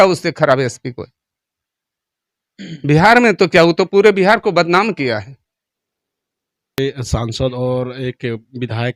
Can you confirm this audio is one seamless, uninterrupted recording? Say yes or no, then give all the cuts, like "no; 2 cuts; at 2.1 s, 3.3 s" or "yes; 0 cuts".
no; 1 cut; at 6.8 s